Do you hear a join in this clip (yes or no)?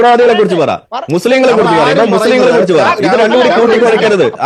no